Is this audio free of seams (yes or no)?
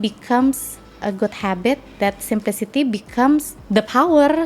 no